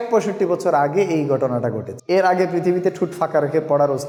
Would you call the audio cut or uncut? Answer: uncut